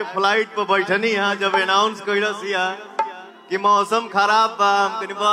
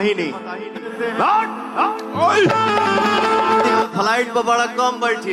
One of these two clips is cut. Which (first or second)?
second